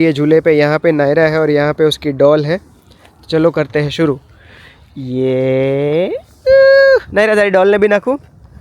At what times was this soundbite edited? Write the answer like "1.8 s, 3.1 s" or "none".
none